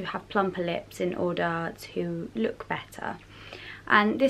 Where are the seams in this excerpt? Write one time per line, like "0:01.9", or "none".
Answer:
none